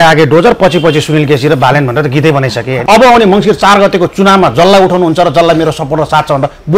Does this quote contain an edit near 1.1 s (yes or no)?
no